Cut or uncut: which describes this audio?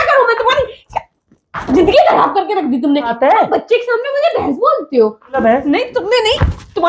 cut